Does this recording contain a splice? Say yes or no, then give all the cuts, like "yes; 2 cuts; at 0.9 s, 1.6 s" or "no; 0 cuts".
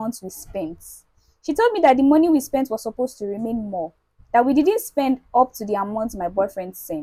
no; 0 cuts